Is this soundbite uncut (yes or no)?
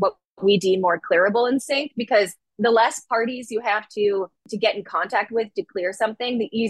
no